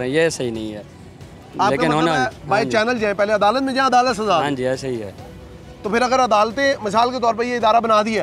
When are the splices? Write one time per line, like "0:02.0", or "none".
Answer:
none